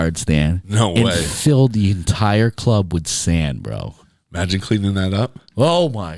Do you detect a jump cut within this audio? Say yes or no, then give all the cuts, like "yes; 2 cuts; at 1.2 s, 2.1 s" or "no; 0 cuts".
no; 0 cuts